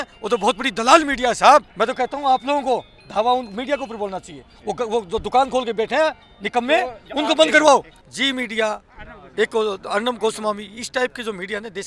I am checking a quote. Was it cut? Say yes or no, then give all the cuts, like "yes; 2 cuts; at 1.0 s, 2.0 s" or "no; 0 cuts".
yes; 2 cuts; at 1.7 s, 8.0 s